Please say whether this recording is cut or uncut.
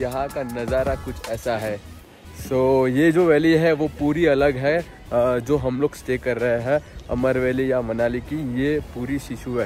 uncut